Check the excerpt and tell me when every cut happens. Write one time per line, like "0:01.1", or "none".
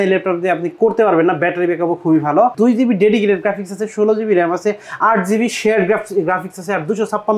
0:02.5